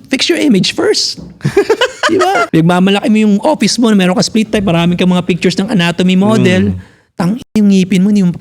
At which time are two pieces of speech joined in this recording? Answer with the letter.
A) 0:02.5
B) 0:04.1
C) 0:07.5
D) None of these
A